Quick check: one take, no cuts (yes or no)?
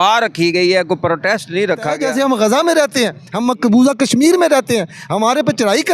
no